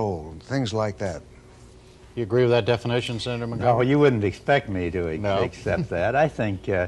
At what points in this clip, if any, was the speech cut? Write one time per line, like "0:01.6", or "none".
0:04.8